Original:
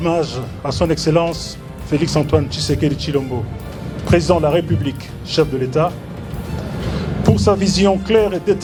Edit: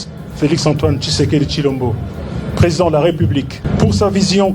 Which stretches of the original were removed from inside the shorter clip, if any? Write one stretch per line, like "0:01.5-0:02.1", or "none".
0:05.1-0:07.0